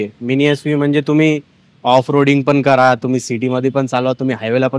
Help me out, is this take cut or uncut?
uncut